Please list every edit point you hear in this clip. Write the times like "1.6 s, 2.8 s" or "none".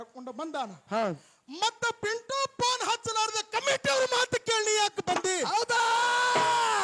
none